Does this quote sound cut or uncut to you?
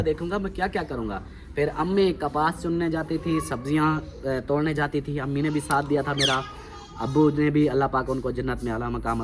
uncut